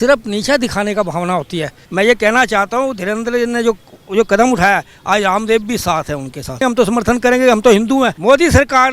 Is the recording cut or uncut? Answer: cut